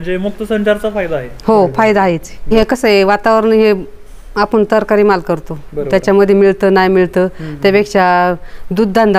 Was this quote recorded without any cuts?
no; 1 cut; at 2.3 s

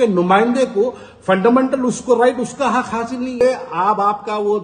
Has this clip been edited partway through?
yes; 1 cut; at 3.4 s

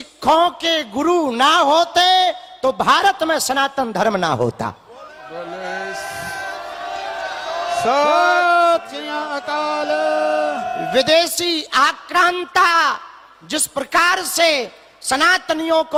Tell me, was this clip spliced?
no; 0 cuts

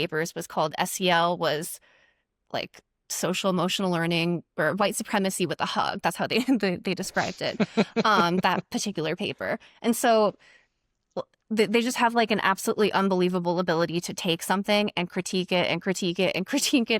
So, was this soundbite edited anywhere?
no; 0 cuts

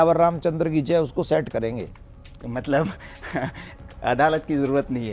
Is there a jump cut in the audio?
no; 0 cuts

